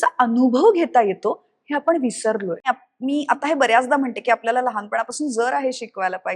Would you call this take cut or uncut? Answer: cut